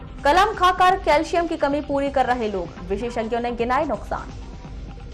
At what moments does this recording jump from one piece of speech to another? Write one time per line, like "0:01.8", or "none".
none